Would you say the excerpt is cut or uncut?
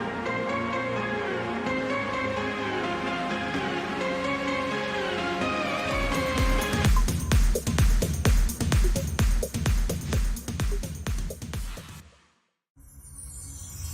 cut